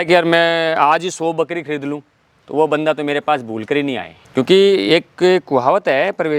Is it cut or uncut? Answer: uncut